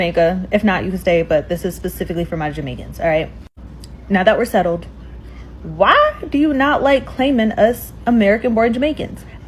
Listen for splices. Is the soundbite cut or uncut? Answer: uncut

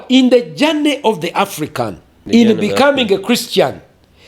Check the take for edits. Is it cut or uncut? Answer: cut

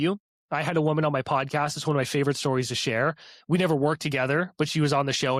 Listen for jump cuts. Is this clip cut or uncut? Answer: uncut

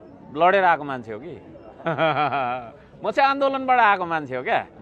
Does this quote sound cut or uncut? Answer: uncut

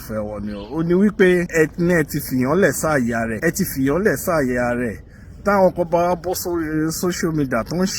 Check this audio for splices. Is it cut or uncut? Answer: cut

